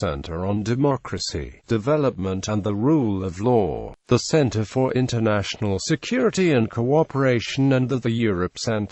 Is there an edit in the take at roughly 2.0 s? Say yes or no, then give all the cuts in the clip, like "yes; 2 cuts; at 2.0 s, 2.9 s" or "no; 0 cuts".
no; 1 cut; at 4.0 s